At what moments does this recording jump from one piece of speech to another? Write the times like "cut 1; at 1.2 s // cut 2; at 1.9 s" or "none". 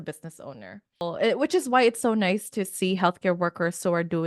cut 1; at 1.0 s